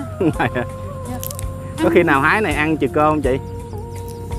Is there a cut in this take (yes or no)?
no